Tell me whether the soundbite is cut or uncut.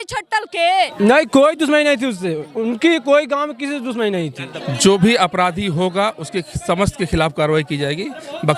cut